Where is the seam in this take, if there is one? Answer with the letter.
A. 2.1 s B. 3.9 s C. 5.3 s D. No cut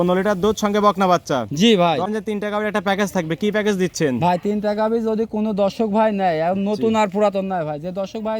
A